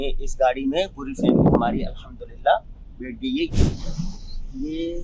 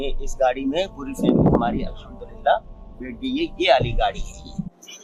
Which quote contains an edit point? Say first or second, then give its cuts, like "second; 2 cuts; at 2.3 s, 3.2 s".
first; 1 cut; at 3.5 s